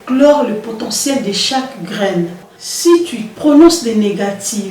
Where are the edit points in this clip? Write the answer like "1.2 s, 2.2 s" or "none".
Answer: 2.5 s

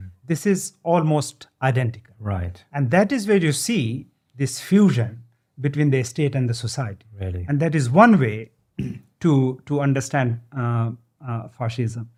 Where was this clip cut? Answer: none

